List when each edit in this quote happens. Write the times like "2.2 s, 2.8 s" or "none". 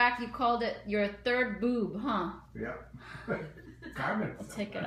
none

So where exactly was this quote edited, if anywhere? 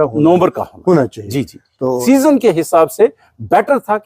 2.0 s

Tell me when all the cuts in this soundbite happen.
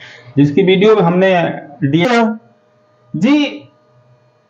2.1 s

